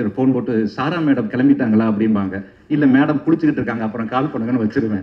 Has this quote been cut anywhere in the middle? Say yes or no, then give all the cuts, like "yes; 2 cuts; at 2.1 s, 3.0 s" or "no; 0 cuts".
no; 0 cuts